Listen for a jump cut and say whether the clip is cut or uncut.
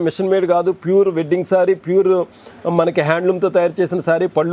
uncut